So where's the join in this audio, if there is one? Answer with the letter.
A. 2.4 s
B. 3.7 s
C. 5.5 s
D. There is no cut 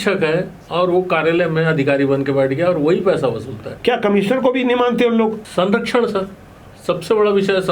B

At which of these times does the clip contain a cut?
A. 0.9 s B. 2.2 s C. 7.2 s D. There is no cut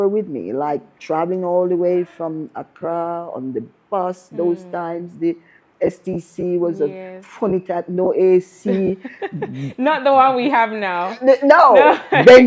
A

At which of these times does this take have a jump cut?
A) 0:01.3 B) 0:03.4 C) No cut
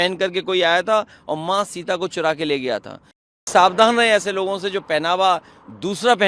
B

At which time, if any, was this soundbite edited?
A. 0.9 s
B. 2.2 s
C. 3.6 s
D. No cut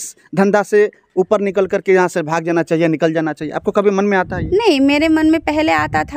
D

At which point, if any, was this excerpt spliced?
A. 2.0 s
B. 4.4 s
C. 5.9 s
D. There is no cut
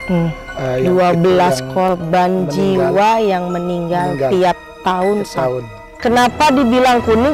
C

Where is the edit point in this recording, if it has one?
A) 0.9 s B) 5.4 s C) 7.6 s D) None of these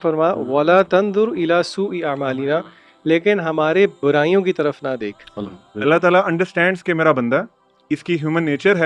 B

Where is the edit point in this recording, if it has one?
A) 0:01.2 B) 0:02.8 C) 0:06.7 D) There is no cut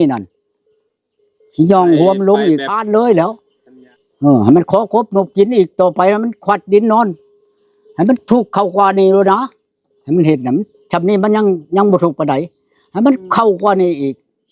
B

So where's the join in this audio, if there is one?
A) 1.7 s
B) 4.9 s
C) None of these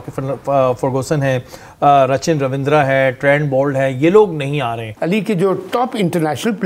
B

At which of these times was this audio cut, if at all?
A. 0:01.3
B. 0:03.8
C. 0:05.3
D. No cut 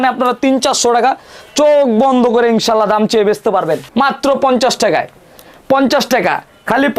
B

